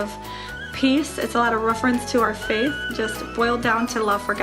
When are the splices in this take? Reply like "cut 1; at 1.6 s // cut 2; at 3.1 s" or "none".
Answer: cut 1; at 2.8 s